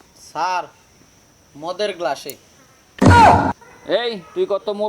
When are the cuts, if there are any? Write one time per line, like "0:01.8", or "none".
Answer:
0:03.8